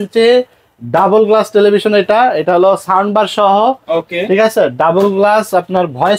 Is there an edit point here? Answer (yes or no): no